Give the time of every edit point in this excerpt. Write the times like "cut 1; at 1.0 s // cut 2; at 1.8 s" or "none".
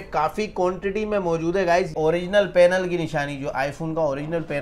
cut 1; at 1.9 s